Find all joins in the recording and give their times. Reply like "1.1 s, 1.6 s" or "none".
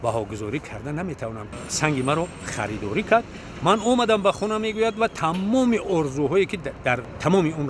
1.6 s

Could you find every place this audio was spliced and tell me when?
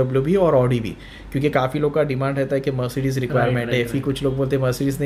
none

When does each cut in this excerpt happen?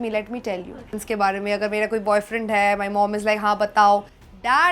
0.9 s

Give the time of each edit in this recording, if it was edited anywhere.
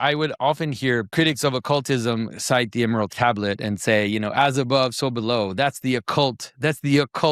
1.1 s, 3.1 s

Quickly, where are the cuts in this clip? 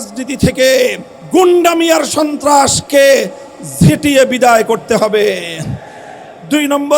1.1 s

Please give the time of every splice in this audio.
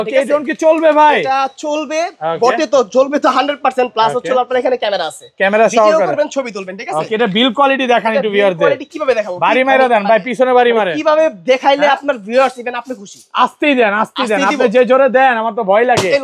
none

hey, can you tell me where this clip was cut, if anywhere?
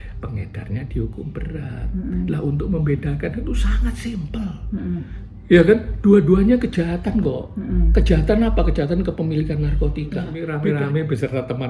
10.4 s

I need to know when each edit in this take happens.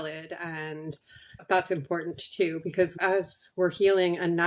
2.9 s

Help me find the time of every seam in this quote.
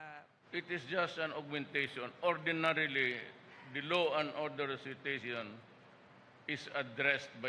3.7 s

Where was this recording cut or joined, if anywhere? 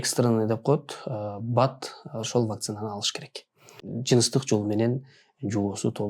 3.8 s

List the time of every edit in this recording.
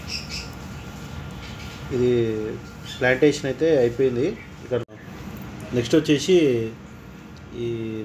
4.8 s

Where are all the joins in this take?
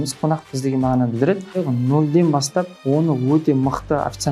1.6 s, 2.7 s

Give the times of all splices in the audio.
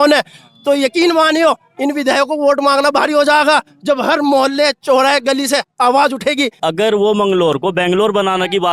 6.6 s

